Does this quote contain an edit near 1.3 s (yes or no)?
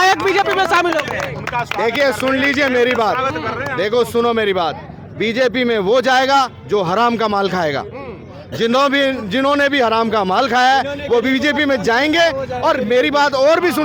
no